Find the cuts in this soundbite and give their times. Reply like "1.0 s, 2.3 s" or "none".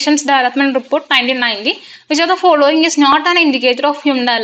none